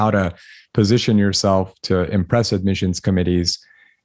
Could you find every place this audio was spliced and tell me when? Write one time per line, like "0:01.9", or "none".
none